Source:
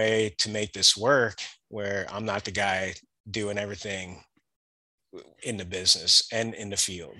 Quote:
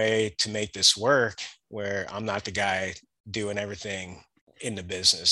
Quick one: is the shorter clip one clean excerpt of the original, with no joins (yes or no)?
no